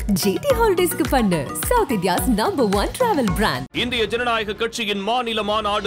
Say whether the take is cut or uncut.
uncut